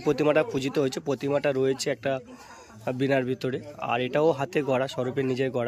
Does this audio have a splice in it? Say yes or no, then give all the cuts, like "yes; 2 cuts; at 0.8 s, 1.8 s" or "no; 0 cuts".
no; 0 cuts